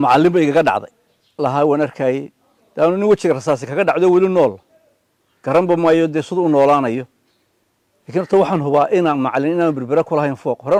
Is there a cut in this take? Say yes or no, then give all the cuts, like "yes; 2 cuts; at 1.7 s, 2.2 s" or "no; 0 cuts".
no; 0 cuts